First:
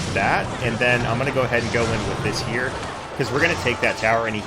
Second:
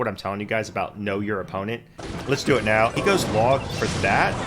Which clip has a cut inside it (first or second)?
second